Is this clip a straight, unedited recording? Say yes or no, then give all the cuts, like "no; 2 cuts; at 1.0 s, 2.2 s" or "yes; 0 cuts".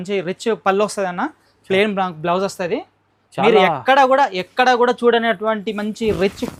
yes; 0 cuts